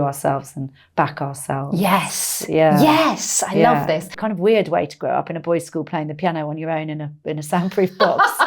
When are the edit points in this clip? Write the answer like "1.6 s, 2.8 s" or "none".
4.1 s

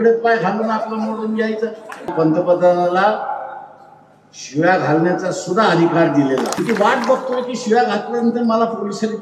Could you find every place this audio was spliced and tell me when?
2.1 s, 6.6 s

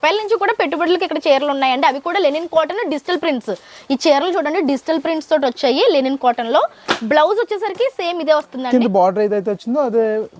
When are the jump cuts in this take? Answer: none

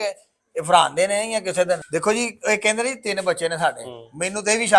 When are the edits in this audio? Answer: 1.9 s

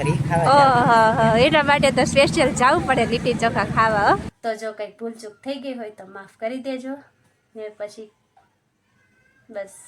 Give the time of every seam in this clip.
4.3 s

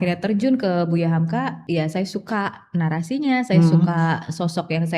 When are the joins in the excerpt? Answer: 1.6 s

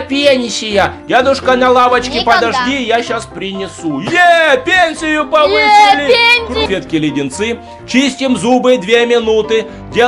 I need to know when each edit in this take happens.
6.6 s

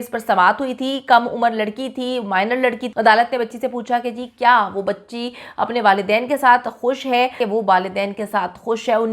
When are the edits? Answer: 2.8 s, 7.4 s

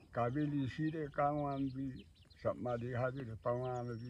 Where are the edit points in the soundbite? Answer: none

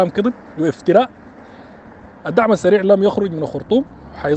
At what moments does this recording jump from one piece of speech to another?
none

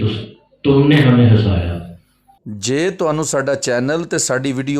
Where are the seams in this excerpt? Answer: 2.6 s

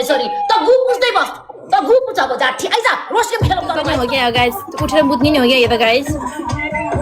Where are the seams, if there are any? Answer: 4.0 s

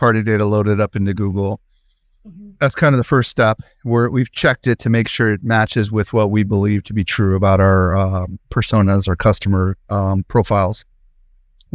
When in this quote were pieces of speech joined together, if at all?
none

